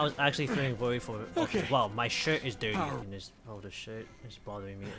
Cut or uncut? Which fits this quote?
cut